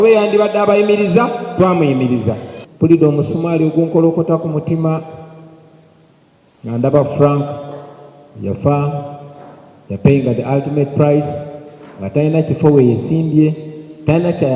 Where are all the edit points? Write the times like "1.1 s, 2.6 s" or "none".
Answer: 2.5 s